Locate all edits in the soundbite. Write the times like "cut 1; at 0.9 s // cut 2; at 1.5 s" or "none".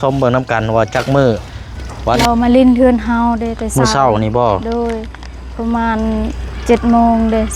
cut 1; at 2.2 s